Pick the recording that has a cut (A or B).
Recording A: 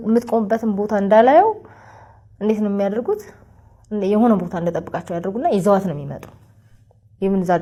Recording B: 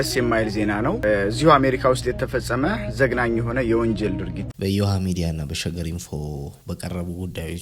B